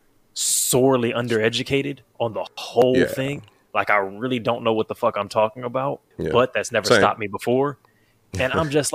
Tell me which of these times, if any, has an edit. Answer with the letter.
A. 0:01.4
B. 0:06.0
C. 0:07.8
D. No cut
D